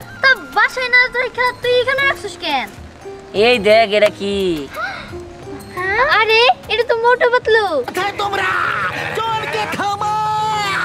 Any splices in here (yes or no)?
yes